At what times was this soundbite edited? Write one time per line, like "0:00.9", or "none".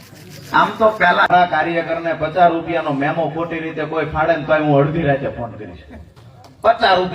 0:01.3